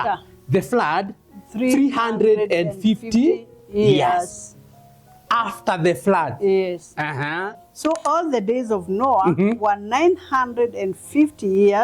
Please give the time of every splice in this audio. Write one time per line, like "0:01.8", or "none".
0:07.6